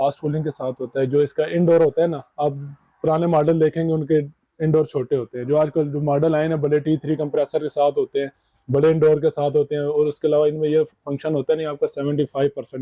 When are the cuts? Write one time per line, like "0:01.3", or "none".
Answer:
none